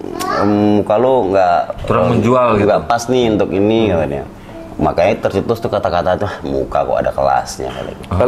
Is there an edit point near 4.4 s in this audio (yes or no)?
no